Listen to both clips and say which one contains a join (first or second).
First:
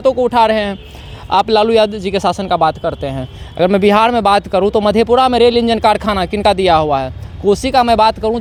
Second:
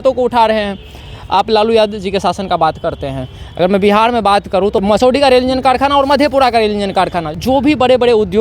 second